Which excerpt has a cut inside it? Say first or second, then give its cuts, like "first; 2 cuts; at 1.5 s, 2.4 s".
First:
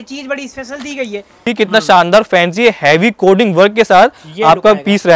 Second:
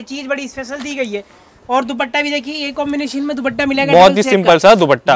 first; 1 cut; at 1.4 s